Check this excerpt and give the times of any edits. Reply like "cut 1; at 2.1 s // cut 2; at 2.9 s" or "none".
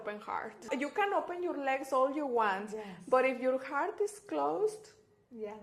none